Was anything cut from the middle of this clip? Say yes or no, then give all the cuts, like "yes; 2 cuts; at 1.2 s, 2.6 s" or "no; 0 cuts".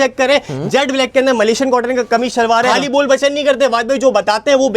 yes; 1 cut; at 2.7 s